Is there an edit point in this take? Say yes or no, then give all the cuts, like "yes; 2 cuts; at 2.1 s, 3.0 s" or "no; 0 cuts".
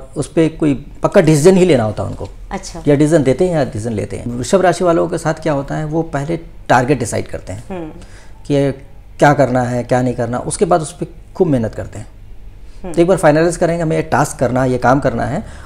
yes; 1 cut; at 4.3 s